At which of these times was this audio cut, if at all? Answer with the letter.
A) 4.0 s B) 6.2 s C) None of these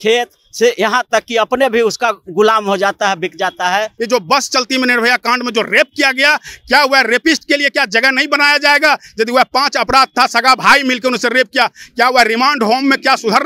A